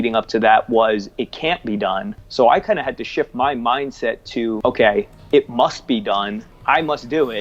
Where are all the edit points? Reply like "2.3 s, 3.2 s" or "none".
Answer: 2.2 s, 4.6 s, 6.4 s

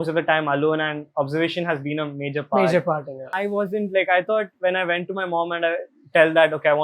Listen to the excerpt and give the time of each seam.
3.3 s

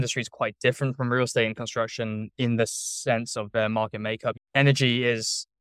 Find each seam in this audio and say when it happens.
none

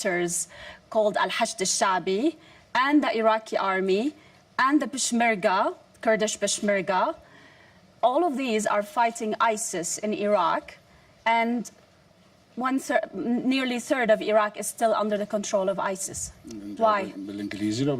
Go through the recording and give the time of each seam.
5.7 s

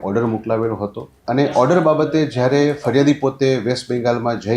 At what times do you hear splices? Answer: 1.1 s

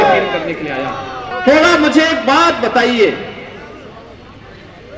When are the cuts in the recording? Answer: 1.3 s

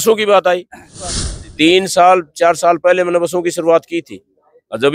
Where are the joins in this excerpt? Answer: 1.1 s

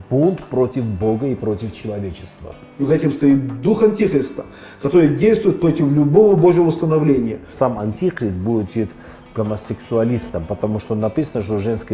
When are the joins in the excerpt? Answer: 2.8 s, 7.4 s

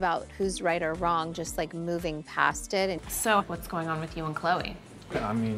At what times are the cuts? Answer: 2.9 s

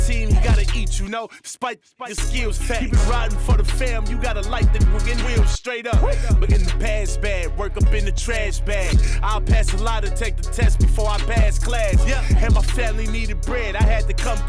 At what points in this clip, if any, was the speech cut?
none

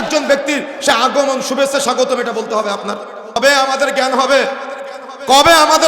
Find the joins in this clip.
3.4 s

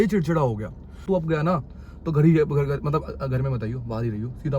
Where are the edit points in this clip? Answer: 1.0 s

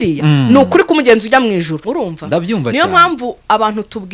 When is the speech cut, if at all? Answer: 1.8 s

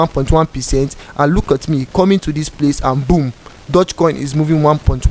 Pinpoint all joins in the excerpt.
none

